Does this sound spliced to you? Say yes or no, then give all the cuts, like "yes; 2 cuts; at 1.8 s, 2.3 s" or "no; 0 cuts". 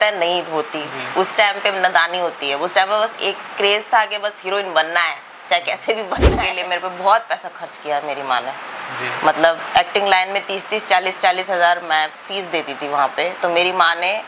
yes; 1 cut; at 6.4 s